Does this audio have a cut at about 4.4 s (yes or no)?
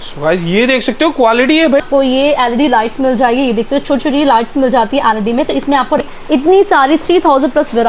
no